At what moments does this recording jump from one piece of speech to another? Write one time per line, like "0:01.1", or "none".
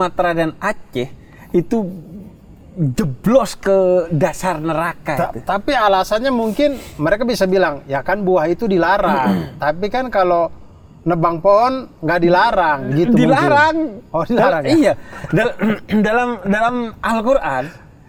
none